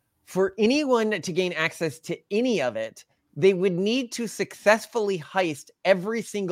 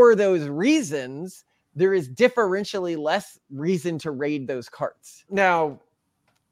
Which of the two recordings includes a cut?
second; 1 cut; at 5.1 s

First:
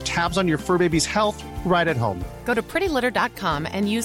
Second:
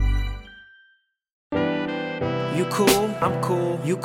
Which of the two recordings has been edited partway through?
second; 1 cut; at 1.4 s

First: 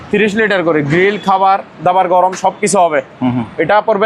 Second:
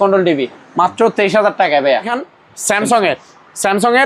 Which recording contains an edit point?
second; 1 cut; at 2.1 s

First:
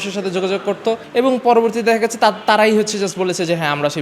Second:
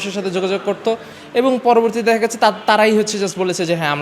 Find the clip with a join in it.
first; 1 cut; at 1.0 s

